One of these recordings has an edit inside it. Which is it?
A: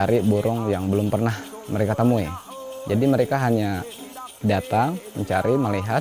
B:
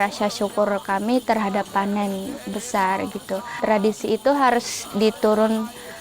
B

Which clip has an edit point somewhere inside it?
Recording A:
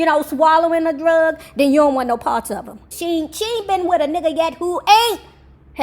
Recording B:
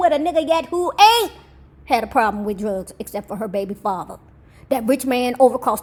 A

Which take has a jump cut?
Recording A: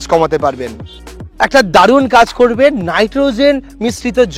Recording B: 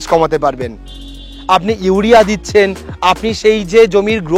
A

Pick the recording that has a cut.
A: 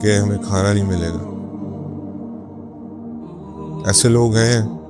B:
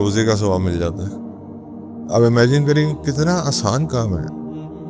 A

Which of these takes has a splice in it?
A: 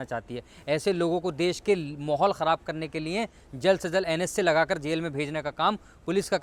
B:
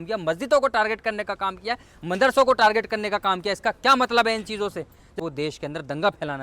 B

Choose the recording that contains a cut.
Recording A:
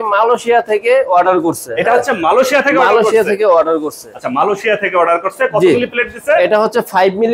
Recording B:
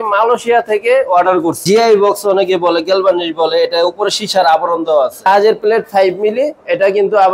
B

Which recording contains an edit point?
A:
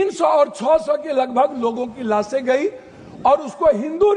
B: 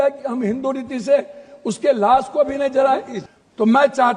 B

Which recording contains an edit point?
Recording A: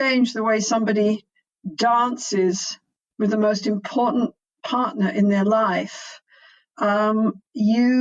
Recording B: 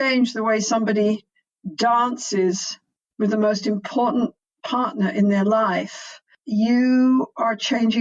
B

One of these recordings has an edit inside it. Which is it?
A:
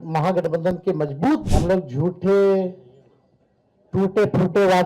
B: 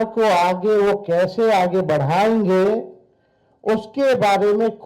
A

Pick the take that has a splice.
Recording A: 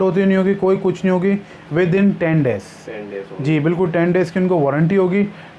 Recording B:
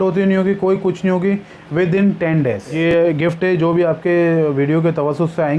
B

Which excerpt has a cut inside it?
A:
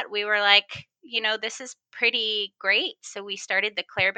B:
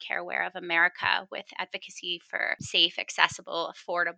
B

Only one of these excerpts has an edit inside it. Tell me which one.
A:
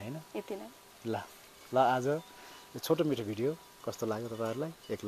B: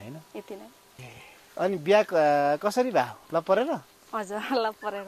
B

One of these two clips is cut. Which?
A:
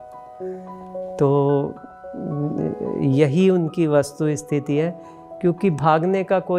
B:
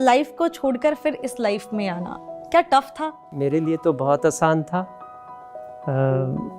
B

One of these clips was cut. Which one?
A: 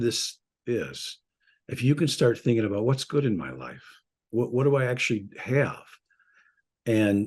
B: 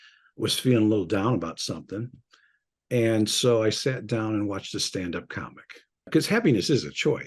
B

